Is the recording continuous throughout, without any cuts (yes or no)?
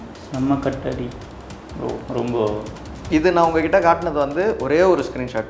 no